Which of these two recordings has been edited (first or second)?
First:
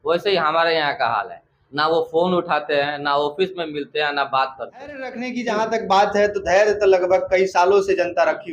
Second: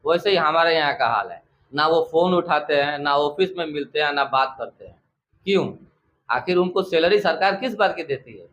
first